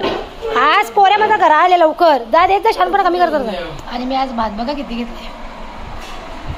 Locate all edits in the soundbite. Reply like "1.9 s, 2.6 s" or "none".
3.8 s